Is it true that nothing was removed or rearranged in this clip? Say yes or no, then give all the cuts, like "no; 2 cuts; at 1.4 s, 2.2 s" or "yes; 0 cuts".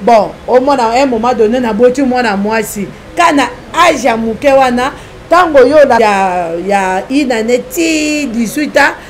no; 1 cut; at 6.0 s